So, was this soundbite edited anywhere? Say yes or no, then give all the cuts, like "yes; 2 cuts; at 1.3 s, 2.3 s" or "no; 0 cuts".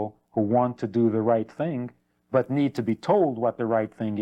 no; 0 cuts